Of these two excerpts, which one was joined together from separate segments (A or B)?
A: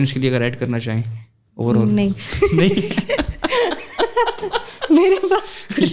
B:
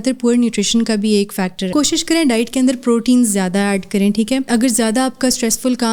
B